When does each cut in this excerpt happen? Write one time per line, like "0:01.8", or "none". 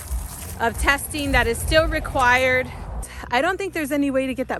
0:03.1